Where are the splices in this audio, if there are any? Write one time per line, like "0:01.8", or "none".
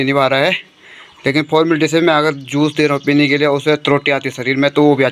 none